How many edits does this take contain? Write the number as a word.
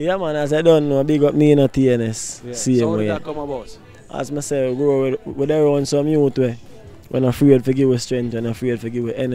zero